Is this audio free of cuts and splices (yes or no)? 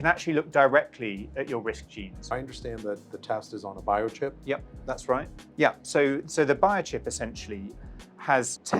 no